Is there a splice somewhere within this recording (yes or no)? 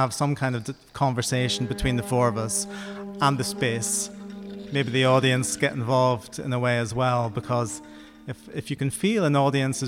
no